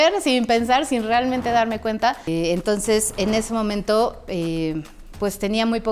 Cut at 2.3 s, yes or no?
yes